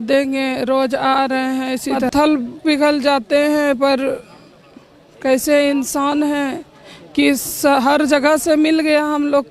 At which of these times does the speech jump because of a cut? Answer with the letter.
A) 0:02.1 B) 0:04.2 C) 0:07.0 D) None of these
A